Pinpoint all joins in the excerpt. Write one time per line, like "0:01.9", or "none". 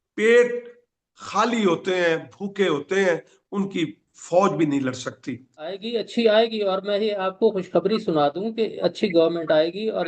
0:05.8